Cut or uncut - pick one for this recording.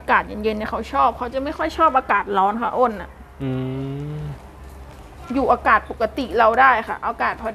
uncut